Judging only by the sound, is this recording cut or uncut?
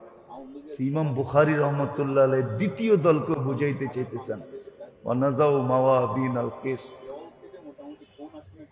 uncut